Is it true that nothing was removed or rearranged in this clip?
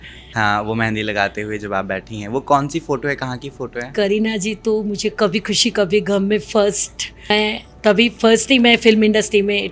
no; 1 cut; at 7.3 s

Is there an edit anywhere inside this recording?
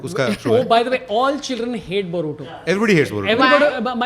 no; 0 cuts

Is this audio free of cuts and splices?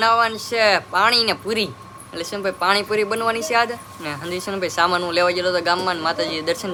yes; 0 cuts

